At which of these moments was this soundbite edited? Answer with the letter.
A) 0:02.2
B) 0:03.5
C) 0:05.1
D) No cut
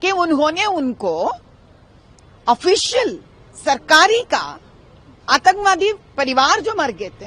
D